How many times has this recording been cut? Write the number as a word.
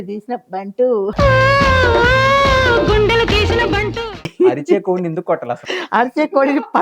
one